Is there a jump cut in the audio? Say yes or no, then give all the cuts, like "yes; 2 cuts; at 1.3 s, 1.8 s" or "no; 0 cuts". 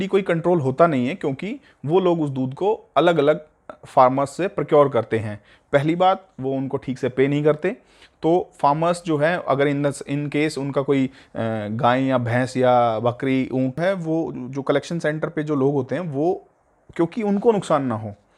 yes; 1 cut; at 13.8 s